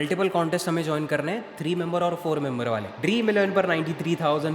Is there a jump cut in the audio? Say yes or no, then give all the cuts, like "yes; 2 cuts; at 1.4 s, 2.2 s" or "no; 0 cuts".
yes; 1 cut; at 2.9 s